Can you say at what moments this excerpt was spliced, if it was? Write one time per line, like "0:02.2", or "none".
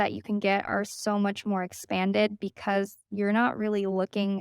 0:03.0